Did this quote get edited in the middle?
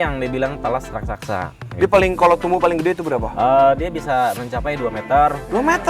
yes; 1 cut; at 1.6 s

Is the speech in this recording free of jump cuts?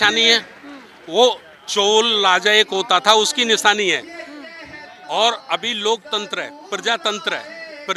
yes; 0 cuts

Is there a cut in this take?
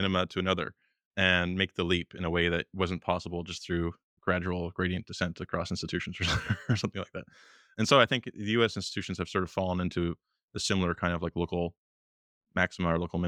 no; 0 cuts

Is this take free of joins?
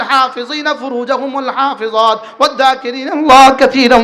yes; 0 cuts

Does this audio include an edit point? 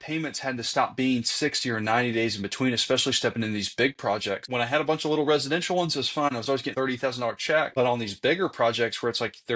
yes; 3 cuts; at 4.4 s, 6.6 s, 7.7 s

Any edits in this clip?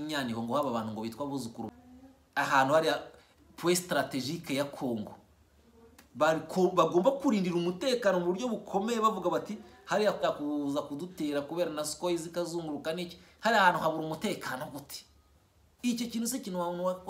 yes; 2 cuts; at 1.7 s, 10.2 s

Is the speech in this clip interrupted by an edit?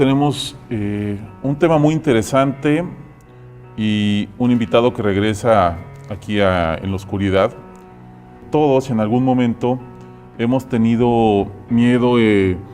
no; 0 cuts

